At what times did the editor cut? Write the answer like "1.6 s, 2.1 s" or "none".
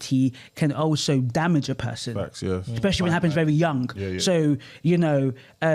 none